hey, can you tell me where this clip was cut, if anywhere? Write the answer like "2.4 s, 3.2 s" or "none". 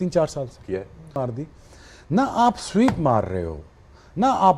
1.1 s